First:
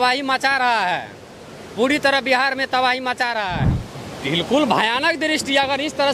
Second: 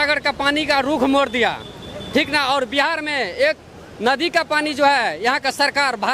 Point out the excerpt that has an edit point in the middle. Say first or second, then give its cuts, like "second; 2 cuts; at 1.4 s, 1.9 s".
first; 1 cut; at 3.7 s